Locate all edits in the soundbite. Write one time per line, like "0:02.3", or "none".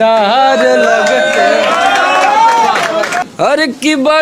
0:03.2